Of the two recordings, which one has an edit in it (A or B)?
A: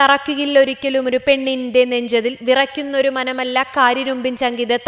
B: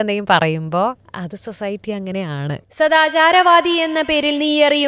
B